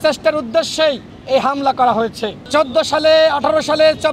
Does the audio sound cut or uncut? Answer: cut